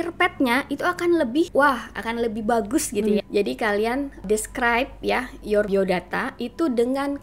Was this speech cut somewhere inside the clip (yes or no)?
yes